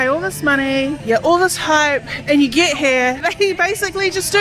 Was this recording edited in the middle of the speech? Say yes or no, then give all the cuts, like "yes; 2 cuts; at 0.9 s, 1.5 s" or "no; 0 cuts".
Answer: yes; 2 cuts; at 1.0 s, 3.2 s